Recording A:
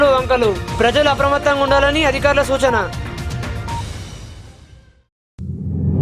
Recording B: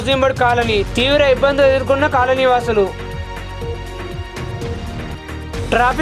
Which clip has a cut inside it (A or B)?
A